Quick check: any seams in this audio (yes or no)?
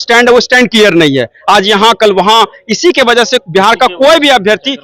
no